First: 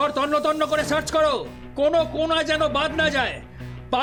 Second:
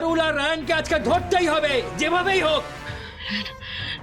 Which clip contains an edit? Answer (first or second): second